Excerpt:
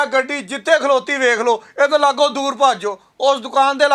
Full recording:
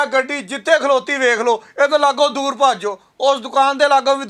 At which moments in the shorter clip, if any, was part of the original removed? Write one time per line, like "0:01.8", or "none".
none